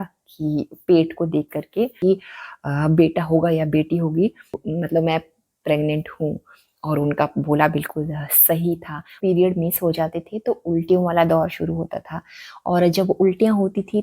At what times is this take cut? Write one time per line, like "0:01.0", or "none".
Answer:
0:01.9
0:04.6
0:09.1